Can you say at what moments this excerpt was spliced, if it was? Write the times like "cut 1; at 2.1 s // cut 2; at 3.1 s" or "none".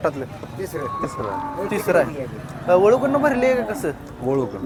none